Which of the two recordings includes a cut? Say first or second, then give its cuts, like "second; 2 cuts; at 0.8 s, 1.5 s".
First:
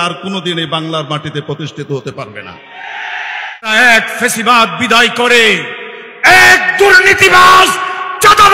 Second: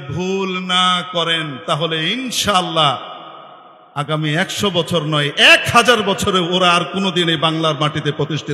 first; 1 cut; at 3.7 s